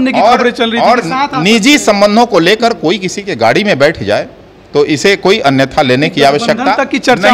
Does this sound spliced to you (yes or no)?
no